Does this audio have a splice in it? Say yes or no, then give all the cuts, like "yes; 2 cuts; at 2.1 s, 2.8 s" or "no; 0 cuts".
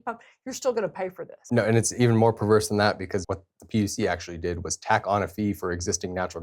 yes; 2 cuts; at 1.4 s, 3.2 s